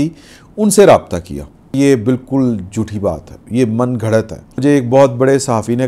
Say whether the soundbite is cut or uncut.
cut